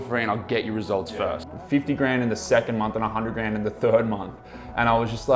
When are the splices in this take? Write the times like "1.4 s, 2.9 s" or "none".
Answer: 1.4 s